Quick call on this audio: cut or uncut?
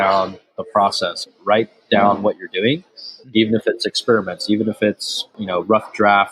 cut